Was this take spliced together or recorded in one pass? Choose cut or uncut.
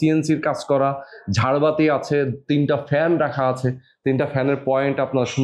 uncut